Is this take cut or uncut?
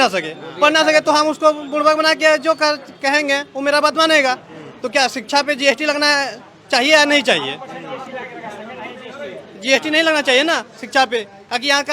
uncut